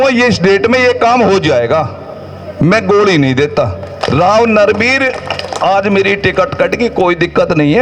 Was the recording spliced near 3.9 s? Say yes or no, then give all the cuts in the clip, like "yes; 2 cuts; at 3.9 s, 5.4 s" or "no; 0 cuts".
yes; 1 cut; at 3.9 s